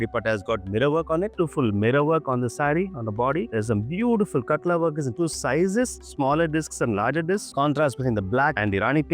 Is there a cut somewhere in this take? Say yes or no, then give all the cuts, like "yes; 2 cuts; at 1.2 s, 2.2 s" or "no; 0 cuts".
yes; 3 cuts; at 1.3 s, 3.5 s, 7.5 s